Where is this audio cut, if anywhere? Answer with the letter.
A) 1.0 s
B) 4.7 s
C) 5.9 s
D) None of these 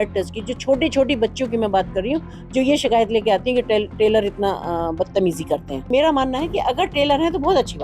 C